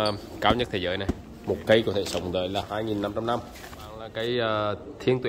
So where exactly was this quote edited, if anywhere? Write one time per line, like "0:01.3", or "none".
0:01.3
0:02.6
0:04.1